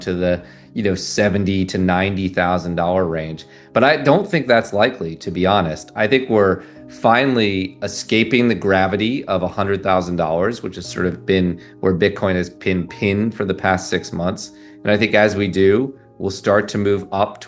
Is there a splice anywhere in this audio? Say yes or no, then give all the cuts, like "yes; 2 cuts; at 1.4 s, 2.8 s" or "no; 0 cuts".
no; 0 cuts